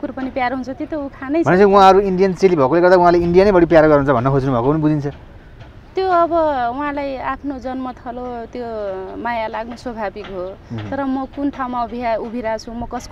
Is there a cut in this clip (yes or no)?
no